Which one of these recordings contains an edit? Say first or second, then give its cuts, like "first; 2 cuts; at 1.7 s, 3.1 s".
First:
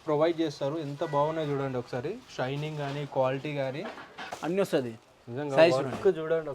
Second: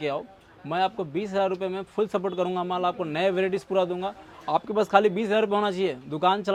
first; 1 cut; at 4.2 s